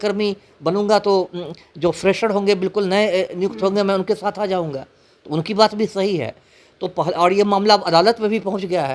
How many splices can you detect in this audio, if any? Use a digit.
0